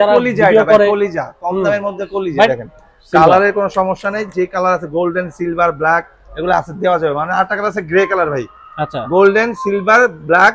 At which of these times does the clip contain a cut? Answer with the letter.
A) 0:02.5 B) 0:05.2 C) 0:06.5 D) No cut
A